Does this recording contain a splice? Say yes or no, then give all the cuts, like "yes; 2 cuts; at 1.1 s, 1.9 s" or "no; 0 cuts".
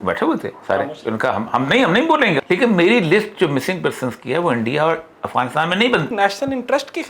yes; 2 cuts; at 2.4 s, 6.1 s